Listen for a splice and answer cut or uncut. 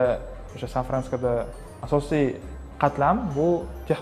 cut